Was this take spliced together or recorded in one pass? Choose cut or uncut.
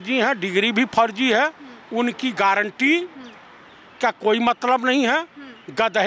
uncut